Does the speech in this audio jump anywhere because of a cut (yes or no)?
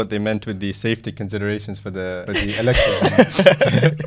yes